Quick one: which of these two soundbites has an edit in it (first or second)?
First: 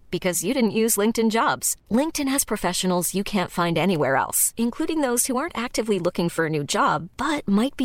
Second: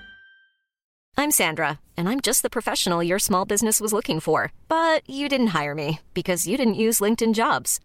second